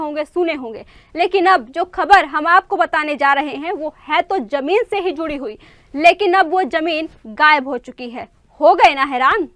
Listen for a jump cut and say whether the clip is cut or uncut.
uncut